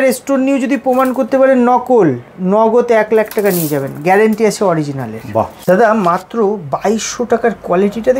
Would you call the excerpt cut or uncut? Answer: cut